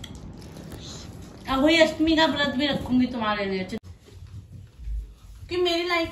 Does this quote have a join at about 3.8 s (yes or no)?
yes